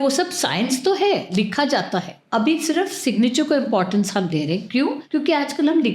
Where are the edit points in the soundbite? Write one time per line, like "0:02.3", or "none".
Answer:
0:02.2
0:05.0